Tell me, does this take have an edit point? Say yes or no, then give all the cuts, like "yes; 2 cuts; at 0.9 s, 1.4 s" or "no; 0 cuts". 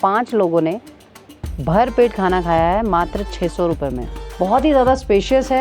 yes; 1 cut; at 4.2 s